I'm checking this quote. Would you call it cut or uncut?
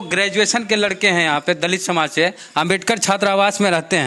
uncut